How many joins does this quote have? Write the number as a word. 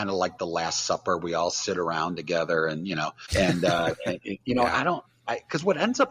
one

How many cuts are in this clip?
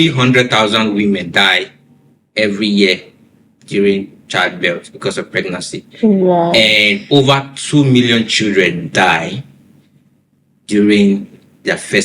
zero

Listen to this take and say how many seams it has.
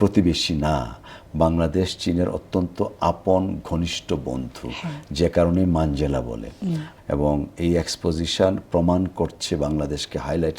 one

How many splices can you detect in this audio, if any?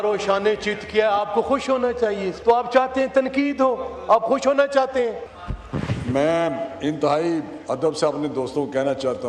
two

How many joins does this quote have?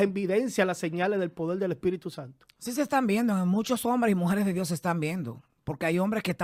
zero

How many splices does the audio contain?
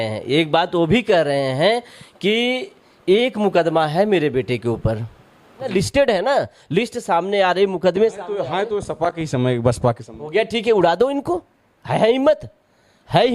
one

